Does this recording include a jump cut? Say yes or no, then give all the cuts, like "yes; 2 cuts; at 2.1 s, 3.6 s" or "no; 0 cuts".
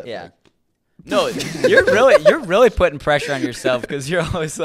no; 0 cuts